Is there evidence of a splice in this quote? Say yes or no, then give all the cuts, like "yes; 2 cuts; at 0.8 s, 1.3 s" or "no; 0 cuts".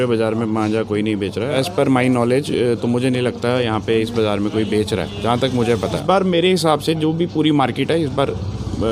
yes; 2 cuts; at 1.6 s, 6.0 s